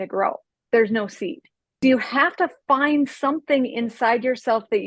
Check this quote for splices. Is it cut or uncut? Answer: cut